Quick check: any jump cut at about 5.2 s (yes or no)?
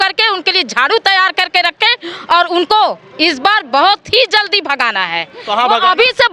no